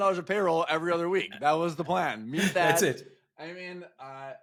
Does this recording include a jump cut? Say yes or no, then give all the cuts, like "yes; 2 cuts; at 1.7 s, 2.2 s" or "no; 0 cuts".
no; 0 cuts